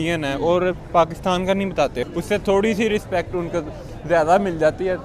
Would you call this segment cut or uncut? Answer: cut